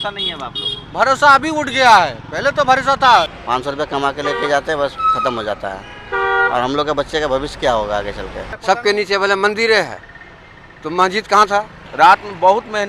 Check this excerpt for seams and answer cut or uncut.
cut